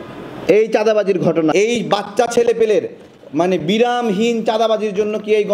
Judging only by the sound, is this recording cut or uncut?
cut